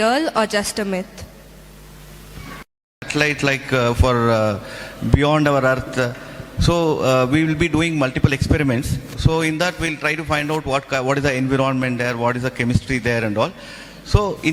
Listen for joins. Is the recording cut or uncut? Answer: uncut